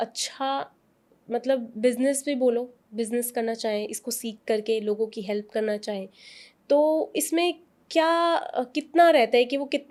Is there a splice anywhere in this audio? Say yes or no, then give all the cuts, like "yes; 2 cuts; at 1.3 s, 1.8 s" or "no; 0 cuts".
no; 0 cuts